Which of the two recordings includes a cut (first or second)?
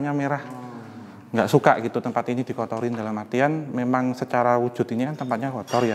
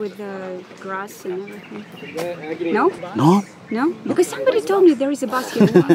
second